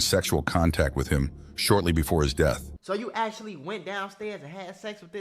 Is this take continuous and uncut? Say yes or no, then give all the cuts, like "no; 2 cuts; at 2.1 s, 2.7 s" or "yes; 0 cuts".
no; 1 cut; at 2.7 s